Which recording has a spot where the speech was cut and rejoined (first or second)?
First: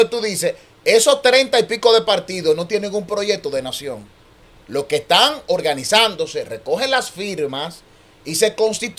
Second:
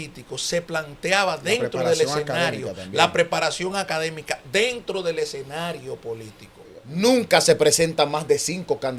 second